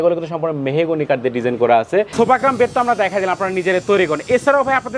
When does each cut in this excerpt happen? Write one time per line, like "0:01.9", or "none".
0:02.1